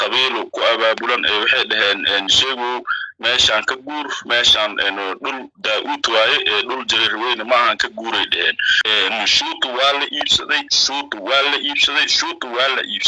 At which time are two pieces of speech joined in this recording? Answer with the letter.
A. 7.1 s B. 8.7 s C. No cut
B